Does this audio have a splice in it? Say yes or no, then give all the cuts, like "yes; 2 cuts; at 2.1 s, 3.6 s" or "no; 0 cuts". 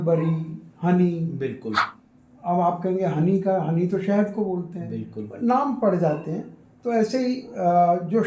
no; 0 cuts